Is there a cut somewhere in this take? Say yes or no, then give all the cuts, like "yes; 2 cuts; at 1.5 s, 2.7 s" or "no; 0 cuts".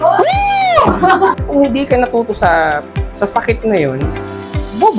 yes; 1 cut; at 1.4 s